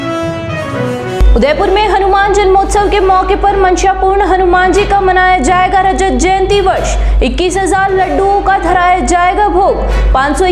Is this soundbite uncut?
no; 1 cut; at 1.0 s

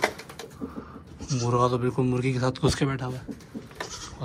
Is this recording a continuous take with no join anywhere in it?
yes; 0 cuts

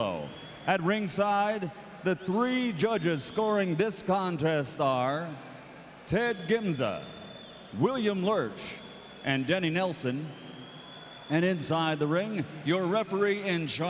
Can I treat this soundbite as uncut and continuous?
no; 1 cut; at 6.7 s

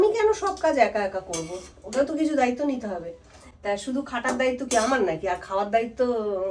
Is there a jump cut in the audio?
no; 0 cuts

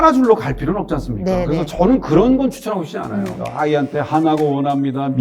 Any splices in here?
yes; 1 cut; at 3.5 s

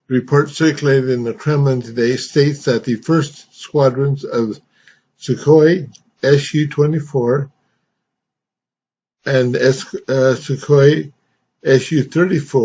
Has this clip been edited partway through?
yes; 1 cut; at 1.9 s

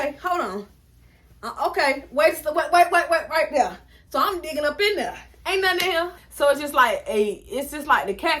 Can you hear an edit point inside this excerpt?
yes; 1 cut; at 6.2 s

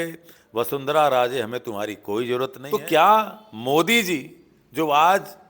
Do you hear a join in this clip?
yes; 1 cut; at 2.6 s

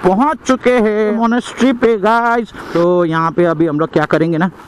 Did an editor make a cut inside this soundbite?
yes; 2 cuts; at 1.2 s, 2.6 s

